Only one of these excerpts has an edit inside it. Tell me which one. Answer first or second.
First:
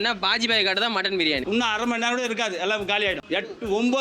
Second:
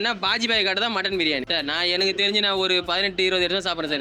first